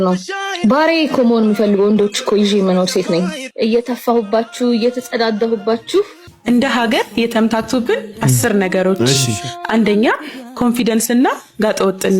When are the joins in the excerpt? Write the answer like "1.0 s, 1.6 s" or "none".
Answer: 3.4 s, 6.3 s

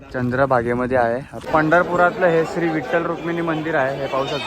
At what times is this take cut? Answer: 1.4 s

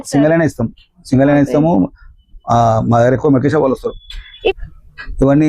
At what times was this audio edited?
4.5 s

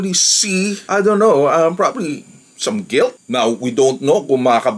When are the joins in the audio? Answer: 3.2 s

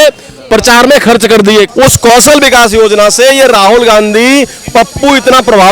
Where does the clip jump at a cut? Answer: 1.7 s

